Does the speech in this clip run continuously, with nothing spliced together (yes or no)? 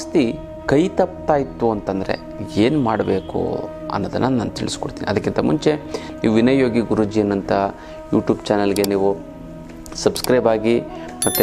yes